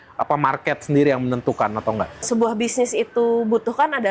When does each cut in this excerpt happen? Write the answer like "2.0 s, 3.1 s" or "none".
2.3 s